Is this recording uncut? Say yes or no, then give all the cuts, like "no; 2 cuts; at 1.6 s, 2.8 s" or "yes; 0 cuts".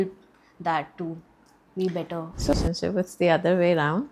no; 1 cut; at 2.5 s